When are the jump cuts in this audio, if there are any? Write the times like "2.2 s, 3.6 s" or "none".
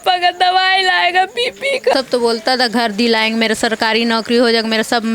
1.9 s